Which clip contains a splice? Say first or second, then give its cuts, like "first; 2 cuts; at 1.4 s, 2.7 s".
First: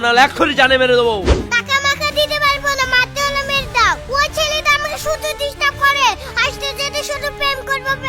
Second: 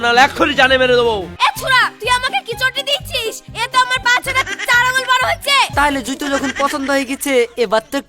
second; 3 cuts; at 1.2 s, 4.0 s, 5.7 s